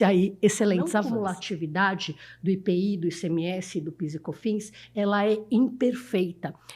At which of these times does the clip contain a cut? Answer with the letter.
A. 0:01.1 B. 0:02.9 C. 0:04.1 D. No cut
A